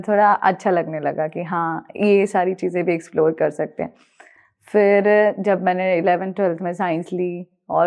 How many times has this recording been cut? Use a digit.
0